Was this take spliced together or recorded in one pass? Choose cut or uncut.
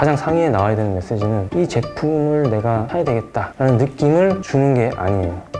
cut